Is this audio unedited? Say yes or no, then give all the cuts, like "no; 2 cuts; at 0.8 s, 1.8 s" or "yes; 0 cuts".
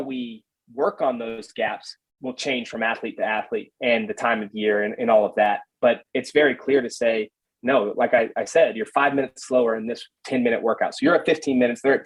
yes; 0 cuts